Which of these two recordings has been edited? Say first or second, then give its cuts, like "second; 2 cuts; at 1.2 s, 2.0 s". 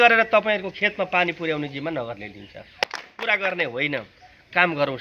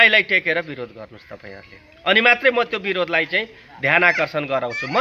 first; 1 cut; at 2.8 s